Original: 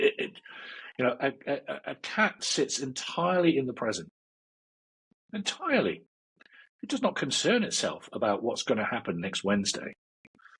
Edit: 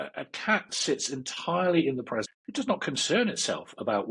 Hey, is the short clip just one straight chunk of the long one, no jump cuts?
no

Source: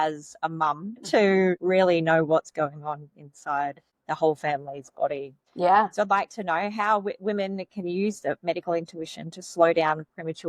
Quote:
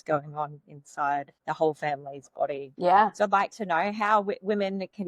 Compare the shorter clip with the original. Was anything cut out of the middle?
yes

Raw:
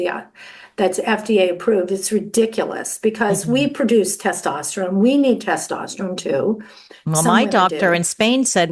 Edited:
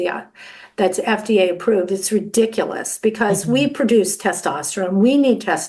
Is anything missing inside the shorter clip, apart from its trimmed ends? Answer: no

